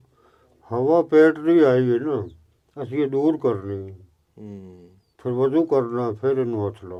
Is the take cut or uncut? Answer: uncut